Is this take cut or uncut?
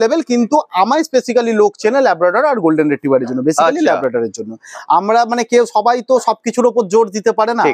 uncut